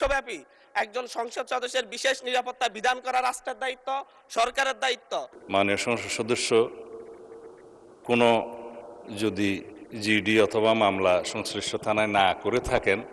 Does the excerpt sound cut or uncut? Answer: cut